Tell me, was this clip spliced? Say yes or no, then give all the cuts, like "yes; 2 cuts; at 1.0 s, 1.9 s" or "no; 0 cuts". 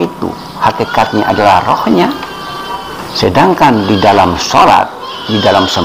no; 0 cuts